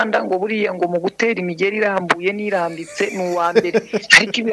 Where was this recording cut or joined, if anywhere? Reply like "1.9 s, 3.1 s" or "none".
none